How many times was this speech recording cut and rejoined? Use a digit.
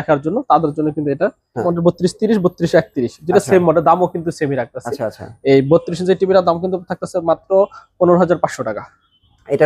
1